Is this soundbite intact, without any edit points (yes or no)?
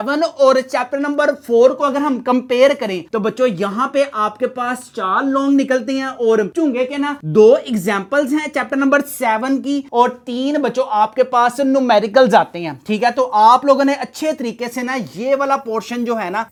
yes